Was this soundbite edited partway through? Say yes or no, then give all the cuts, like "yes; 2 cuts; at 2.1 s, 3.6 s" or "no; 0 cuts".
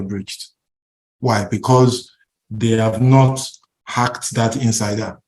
no; 0 cuts